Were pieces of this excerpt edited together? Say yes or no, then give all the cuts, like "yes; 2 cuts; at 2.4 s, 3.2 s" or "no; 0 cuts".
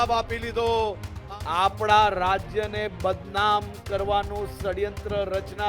yes; 1 cut; at 1.1 s